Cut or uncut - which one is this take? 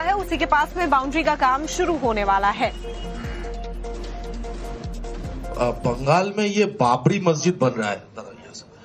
cut